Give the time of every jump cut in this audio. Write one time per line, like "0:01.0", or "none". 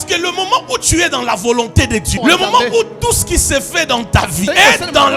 0:02.1
0:04.5